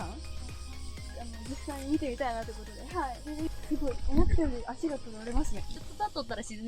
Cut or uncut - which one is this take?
cut